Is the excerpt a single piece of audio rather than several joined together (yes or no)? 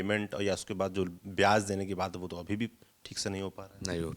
yes